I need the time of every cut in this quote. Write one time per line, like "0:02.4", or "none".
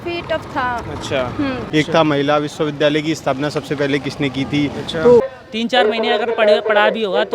0:01.6
0:05.3